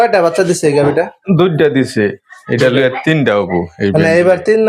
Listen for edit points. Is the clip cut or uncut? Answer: uncut